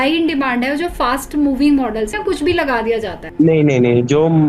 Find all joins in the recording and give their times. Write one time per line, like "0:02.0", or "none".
0:02.2